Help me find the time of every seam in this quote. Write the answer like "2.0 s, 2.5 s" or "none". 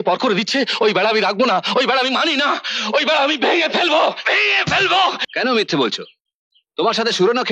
5.2 s